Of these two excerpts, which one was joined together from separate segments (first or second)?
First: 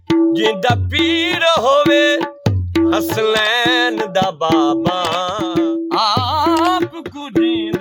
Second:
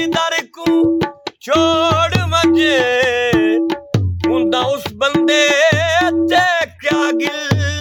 first